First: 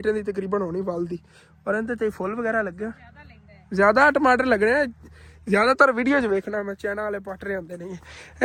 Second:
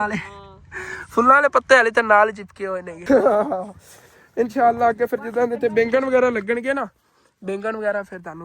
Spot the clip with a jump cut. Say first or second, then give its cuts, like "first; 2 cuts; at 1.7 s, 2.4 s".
second; 1 cut; at 2.9 s